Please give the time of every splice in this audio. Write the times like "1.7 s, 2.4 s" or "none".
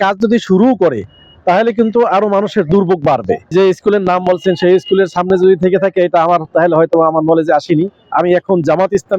3.5 s, 8.0 s